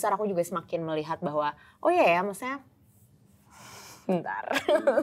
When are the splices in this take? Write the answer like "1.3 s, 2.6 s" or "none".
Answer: none